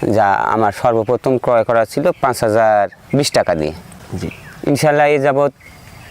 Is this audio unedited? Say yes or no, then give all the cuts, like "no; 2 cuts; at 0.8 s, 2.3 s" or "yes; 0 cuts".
no; 1 cut; at 3.9 s